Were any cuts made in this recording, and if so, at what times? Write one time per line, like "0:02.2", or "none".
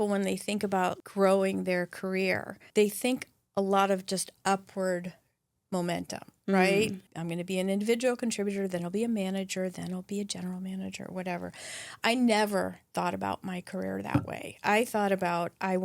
0:01.0
0:02.6
0:07.0